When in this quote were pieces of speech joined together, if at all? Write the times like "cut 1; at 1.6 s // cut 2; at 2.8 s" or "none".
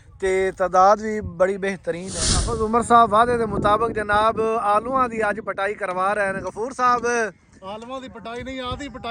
cut 1; at 2.1 s

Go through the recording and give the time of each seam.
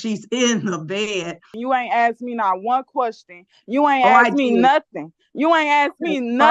cut 1; at 1.5 s

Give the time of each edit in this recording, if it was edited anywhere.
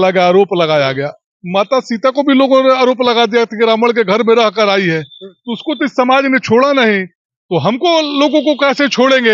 none

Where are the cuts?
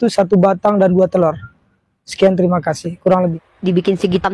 cut 1; at 3.3 s

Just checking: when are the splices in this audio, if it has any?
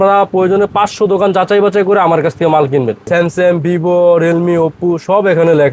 cut 1; at 3.1 s

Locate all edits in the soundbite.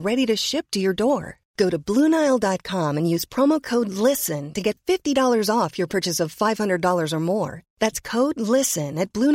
none

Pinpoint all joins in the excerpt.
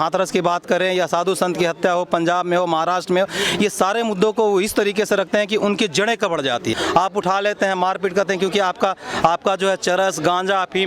cut 1; at 6.7 s

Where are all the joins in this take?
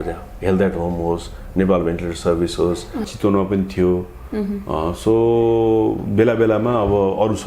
cut 1; at 3.1 s

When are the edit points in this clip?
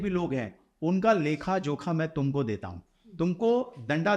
none

